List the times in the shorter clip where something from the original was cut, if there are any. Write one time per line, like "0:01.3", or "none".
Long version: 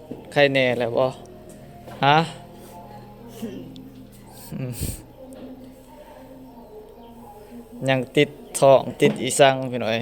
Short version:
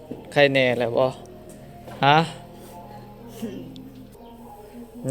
0:04.2